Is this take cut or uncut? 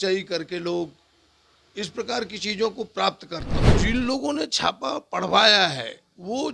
cut